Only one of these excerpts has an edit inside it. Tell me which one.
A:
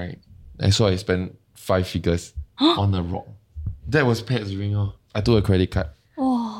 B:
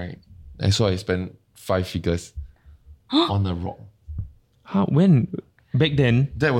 A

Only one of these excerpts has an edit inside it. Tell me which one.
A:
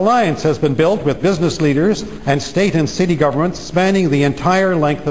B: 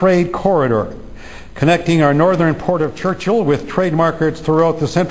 B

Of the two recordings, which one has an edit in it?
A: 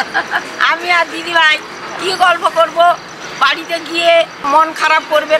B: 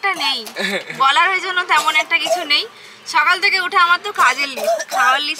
A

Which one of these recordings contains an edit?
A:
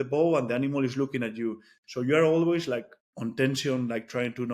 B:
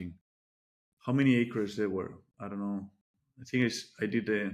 A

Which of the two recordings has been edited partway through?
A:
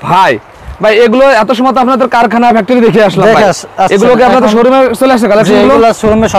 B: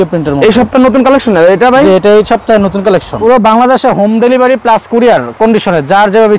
B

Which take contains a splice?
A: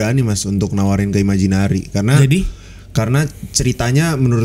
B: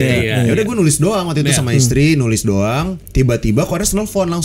B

